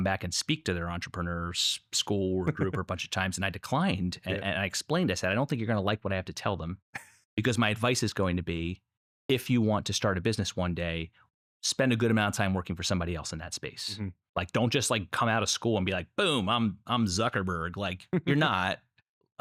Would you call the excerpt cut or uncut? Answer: uncut